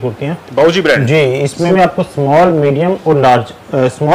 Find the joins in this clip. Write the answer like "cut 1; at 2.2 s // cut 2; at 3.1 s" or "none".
cut 1; at 1.7 s